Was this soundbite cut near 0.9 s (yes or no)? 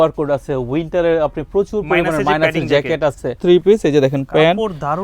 no